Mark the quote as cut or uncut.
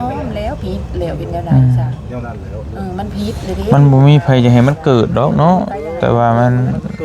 uncut